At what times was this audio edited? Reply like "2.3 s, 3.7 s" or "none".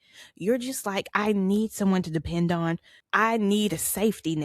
2.9 s